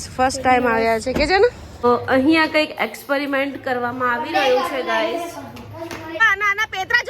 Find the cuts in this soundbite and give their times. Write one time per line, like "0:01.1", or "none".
0:01.7
0:06.2